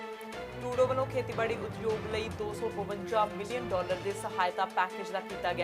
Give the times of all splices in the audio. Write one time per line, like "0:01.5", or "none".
none